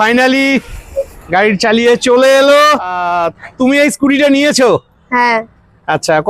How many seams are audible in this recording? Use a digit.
1